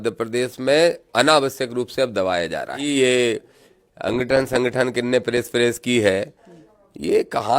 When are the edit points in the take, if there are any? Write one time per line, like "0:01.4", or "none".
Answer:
0:02.9

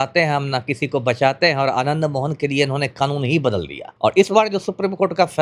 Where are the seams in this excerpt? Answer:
0:03.8

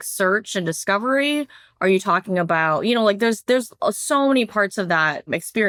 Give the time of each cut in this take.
none

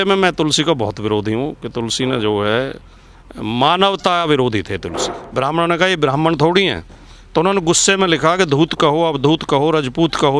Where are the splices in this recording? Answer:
0:05.2

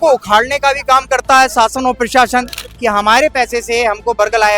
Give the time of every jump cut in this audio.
0:02.6

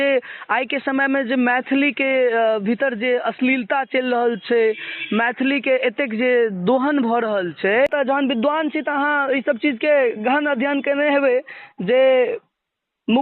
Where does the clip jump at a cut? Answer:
0:07.9

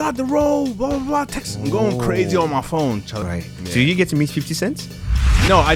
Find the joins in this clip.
0:03.1

